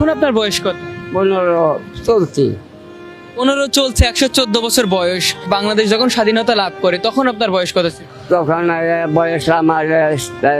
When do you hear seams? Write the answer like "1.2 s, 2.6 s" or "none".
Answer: 0.9 s, 1.9 s, 8.1 s